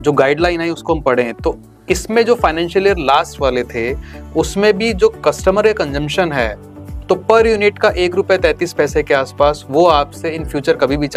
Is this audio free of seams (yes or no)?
yes